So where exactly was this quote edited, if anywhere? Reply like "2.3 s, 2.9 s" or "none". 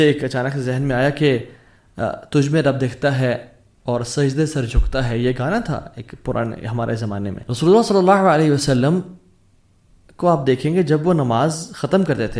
7.4 s